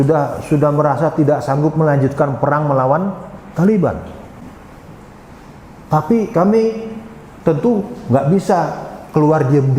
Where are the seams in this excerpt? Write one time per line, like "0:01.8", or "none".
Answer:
none